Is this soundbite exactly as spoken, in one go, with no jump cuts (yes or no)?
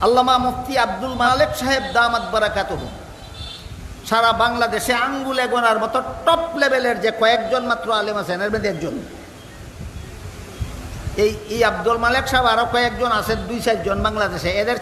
no